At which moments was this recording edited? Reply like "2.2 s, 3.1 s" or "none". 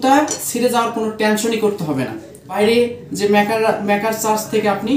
2.5 s